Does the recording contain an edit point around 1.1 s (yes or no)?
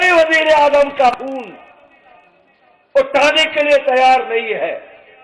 yes